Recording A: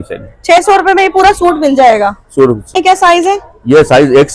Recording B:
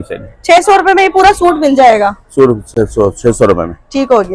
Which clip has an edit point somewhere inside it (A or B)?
A